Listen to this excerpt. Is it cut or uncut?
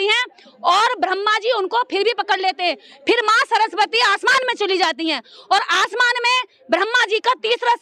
uncut